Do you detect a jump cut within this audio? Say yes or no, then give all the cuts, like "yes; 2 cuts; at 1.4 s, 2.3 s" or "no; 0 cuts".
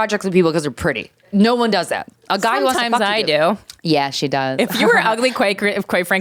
yes; 2 cuts; at 1.2 s, 3.7 s